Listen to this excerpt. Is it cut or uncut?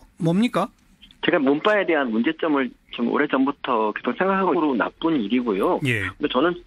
uncut